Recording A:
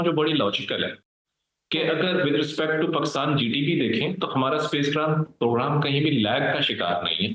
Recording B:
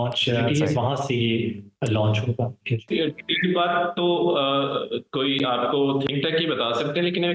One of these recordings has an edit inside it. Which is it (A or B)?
B